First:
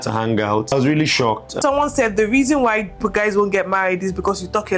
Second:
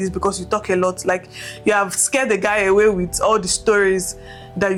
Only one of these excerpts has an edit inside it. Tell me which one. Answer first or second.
first